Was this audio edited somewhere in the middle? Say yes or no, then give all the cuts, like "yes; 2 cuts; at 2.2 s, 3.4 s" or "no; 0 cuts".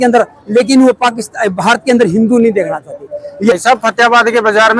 yes; 1 cut; at 3.5 s